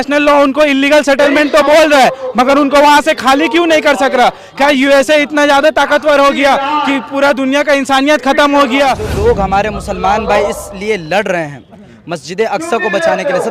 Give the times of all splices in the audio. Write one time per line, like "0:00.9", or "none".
0:09.1